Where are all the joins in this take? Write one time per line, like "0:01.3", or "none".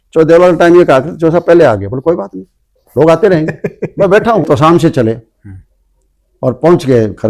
0:04.5